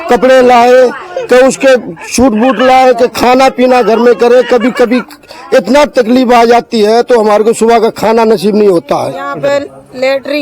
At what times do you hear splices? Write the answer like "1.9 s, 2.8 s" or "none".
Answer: 9.3 s